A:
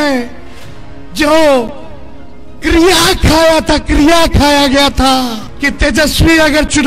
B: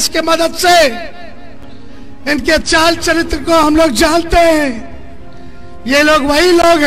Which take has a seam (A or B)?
A